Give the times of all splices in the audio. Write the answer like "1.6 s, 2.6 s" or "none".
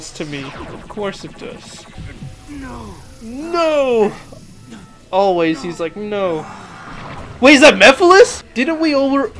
1.9 s, 8.5 s